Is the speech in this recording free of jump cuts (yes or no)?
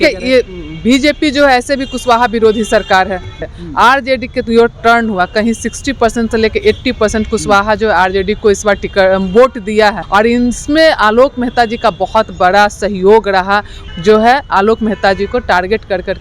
no